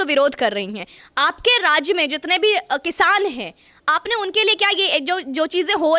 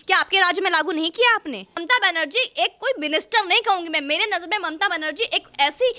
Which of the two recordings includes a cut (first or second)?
second